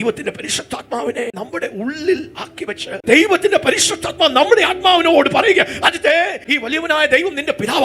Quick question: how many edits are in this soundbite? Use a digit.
2